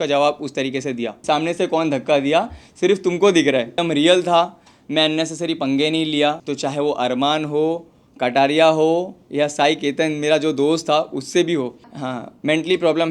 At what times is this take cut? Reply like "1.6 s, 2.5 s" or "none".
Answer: 1.2 s, 3.8 s, 6.5 s, 11.9 s